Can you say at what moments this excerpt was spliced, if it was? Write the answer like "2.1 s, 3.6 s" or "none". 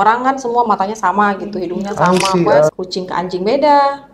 2.7 s